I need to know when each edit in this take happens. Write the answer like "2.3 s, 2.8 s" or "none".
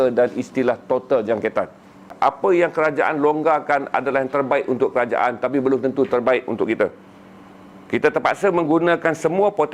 2.1 s